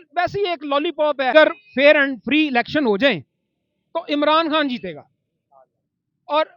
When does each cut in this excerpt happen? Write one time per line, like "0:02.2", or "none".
0:01.3